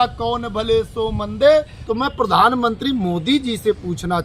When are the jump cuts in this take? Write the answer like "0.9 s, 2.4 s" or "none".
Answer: 1.8 s